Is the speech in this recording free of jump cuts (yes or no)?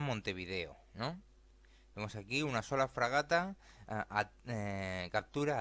yes